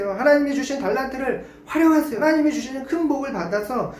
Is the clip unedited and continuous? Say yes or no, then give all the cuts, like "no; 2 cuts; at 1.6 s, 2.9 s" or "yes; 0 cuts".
no; 1 cut; at 2.1 s